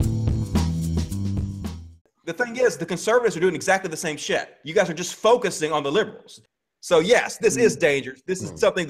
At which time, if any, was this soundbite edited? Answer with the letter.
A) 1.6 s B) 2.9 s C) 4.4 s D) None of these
A